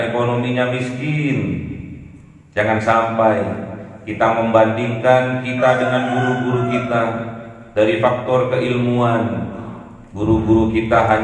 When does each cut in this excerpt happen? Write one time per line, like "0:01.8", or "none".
none

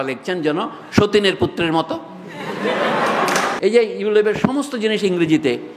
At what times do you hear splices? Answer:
0:03.5

